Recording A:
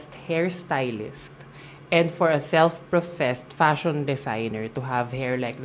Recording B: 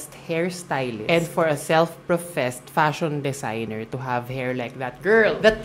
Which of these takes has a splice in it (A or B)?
B